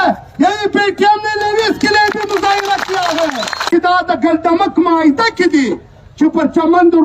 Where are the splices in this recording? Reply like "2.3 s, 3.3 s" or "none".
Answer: 3.7 s

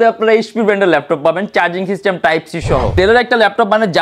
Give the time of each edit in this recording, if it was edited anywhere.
2.9 s

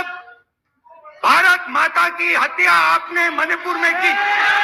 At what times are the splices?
none

